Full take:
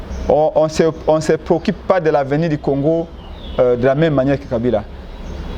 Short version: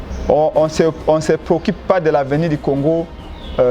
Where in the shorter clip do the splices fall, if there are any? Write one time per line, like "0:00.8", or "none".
none